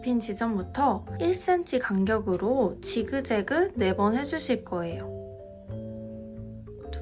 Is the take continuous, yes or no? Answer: no